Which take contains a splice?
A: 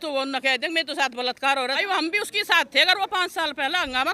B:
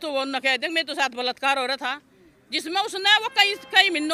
A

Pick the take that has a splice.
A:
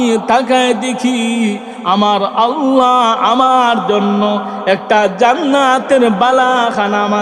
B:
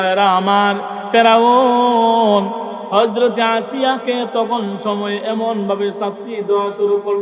B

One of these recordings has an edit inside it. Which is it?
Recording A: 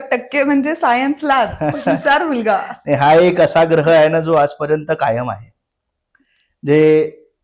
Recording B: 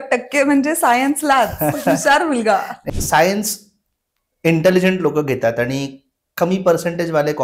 B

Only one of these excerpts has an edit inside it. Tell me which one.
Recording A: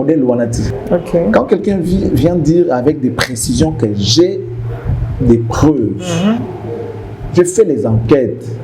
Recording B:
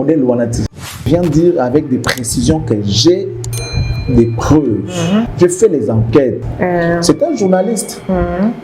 B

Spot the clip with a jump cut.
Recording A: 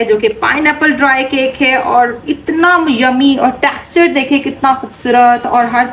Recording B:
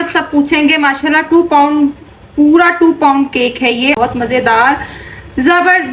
B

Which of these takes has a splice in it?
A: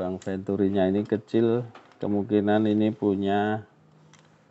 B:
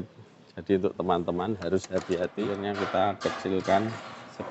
B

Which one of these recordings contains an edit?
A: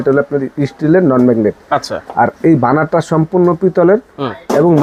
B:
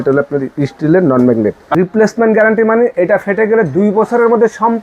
B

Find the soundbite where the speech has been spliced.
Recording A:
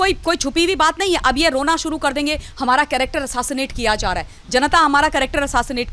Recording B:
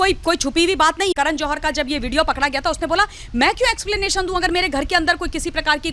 B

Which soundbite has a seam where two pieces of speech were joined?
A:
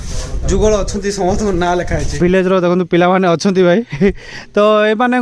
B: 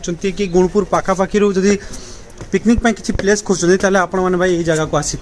A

